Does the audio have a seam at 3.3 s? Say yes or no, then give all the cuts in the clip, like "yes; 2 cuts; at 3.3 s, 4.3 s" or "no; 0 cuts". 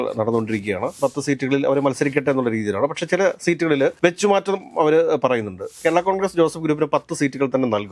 no; 2 cuts; at 1.0 s, 5.8 s